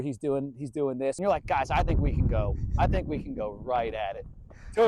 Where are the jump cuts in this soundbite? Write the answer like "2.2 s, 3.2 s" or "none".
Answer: 1.2 s

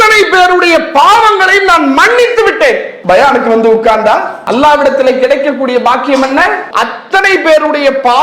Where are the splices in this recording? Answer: 4.4 s, 6.7 s

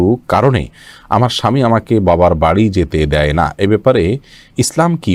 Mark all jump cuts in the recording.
none

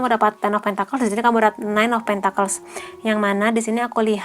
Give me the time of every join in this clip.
none

